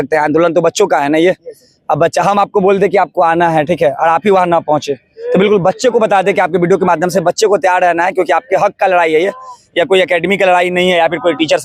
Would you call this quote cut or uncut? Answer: uncut